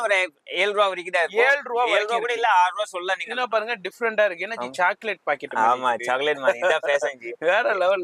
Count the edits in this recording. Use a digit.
0